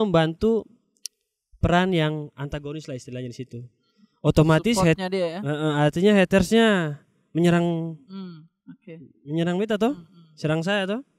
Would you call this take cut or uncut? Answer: uncut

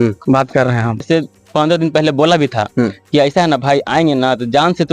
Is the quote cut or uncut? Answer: cut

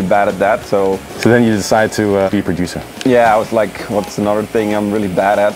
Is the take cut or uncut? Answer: cut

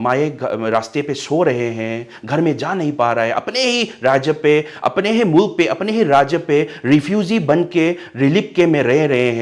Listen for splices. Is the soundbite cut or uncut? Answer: uncut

